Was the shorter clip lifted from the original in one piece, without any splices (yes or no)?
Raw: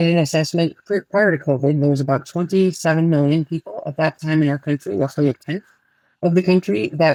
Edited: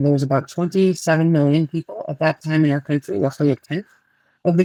yes